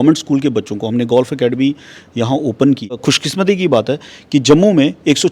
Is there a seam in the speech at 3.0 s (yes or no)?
yes